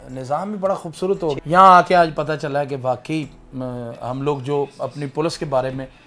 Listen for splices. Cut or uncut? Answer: cut